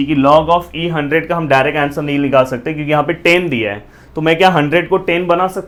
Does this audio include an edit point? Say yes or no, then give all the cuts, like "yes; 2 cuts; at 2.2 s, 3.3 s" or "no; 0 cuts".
no; 0 cuts